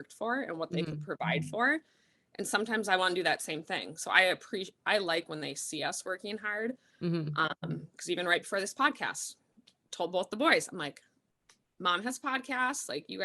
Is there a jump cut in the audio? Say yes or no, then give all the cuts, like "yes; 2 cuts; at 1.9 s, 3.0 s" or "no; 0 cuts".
no; 0 cuts